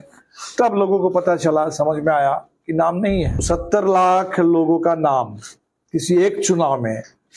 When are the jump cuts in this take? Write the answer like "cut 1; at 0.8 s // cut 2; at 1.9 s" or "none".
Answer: cut 1; at 3.4 s